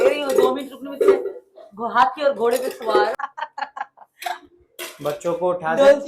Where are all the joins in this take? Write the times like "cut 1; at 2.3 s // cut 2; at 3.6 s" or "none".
cut 1; at 3.1 s